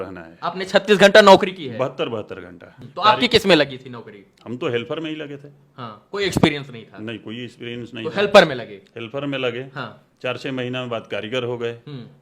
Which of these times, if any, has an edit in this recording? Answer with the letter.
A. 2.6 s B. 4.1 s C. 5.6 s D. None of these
A